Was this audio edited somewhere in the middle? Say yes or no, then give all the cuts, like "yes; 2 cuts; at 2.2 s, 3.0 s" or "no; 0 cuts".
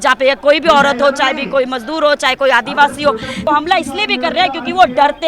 yes; 1 cut; at 3.4 s